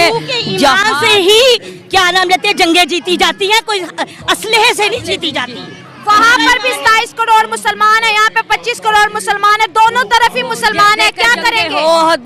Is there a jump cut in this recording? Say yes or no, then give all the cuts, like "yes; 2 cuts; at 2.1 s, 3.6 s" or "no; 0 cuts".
no; 0 cuts